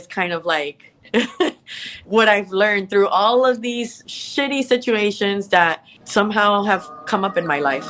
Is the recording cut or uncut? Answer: cut